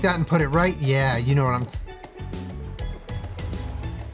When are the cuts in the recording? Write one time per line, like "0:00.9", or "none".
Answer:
none